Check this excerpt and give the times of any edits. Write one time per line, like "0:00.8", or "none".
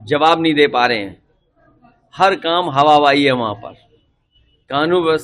none